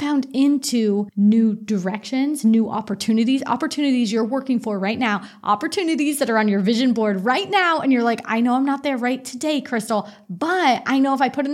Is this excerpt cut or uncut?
cut